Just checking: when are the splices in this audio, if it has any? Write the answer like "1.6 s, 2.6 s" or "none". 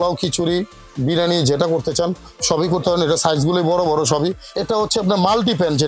4.5 s